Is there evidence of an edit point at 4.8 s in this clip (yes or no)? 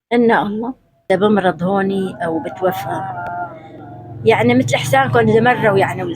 no